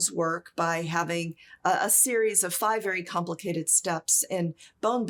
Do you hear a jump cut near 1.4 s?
no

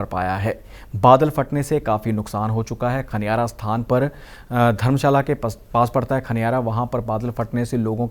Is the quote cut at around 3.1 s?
no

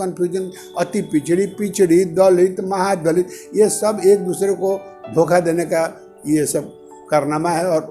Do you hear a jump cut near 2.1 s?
no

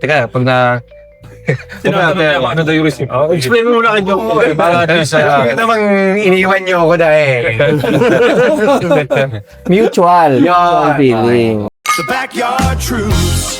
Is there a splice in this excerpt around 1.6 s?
no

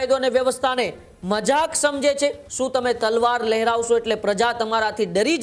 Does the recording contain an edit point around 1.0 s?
no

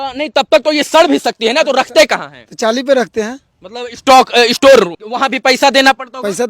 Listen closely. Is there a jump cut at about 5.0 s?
yes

